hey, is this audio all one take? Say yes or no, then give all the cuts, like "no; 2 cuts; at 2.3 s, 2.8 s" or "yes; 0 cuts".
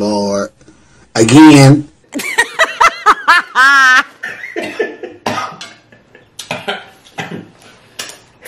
yes; 0 cuts